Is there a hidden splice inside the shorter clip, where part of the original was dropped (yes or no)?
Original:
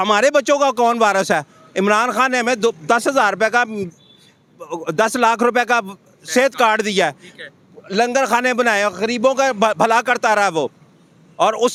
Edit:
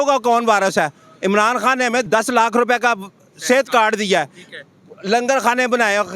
yes